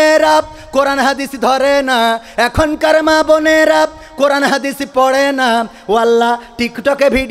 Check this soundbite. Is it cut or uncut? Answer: uncut